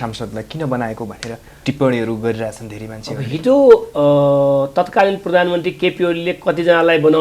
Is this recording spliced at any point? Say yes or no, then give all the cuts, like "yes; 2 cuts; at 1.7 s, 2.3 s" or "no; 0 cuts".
no; 0 cuts